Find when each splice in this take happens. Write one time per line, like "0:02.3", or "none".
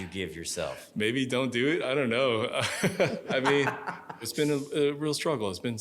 0:03.2
0:04.3